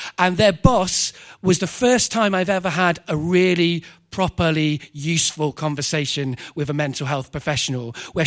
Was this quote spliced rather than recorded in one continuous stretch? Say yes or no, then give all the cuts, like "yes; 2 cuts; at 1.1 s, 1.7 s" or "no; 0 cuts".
no; 0 cuts